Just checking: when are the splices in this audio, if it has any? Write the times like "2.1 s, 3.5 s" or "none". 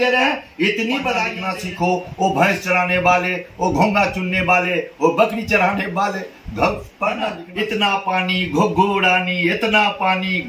1.4 s, 7.4 s